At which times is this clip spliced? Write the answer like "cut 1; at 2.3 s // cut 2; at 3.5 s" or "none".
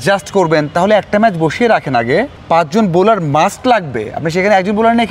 cut 1; at 2.4 s